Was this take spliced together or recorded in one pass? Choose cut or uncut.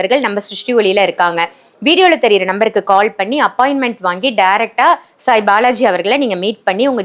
uncut